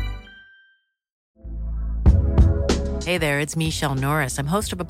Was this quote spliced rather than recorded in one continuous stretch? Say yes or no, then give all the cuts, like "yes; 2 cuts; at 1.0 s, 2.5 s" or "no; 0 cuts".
yes; 1 cut; at 1.2 s